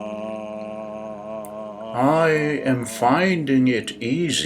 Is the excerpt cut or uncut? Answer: cut